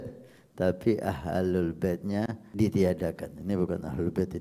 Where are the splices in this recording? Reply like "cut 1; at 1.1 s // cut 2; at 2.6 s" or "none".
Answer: cut 1; at 2.4 s